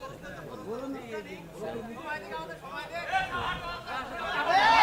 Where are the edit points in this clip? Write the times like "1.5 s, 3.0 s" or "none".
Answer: none